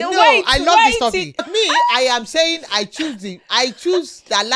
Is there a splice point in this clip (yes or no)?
yes